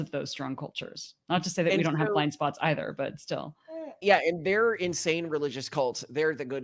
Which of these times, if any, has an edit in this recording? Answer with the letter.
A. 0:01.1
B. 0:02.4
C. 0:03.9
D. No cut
C